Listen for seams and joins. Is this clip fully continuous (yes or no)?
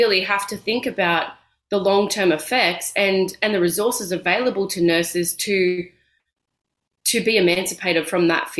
yes